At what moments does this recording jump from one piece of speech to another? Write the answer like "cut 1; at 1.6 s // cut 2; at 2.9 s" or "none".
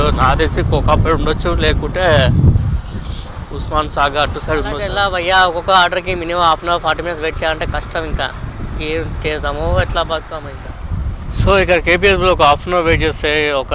cut 1; at 4.9 s // cut 2; at 10.4 s